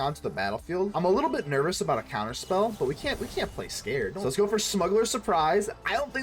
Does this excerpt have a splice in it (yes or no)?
yes